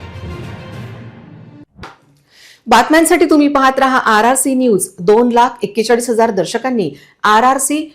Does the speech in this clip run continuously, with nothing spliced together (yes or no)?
yes